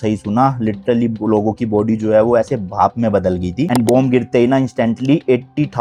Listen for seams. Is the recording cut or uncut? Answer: uncut